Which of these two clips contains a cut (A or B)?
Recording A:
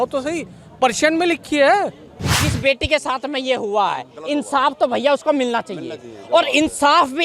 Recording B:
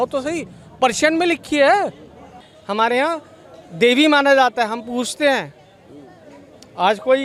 A